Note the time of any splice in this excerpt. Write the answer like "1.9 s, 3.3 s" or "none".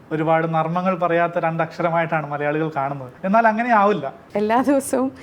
3.1 s, 4.2 s